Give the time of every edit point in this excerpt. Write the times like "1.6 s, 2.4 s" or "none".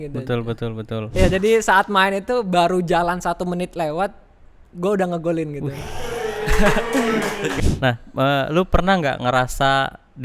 1.1 s, 7.5 s